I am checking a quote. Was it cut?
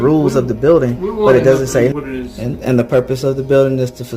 yes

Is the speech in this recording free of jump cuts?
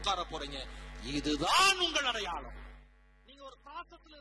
no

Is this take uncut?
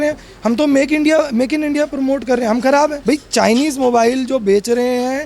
no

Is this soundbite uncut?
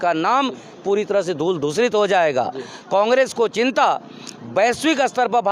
yes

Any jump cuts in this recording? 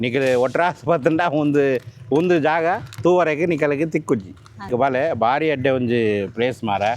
yes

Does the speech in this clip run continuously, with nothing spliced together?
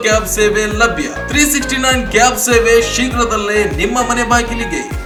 yes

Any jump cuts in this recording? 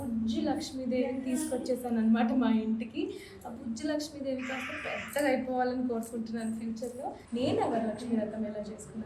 yes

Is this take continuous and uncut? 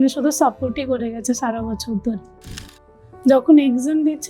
no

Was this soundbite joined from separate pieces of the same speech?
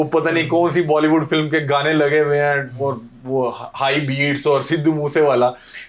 no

